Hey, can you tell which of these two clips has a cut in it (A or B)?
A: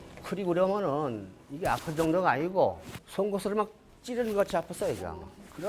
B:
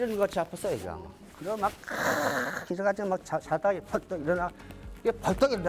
A